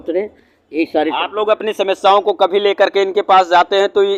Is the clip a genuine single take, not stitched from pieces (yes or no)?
yes